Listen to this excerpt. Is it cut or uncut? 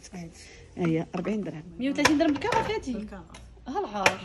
cut